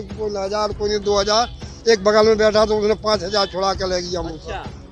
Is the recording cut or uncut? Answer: uncut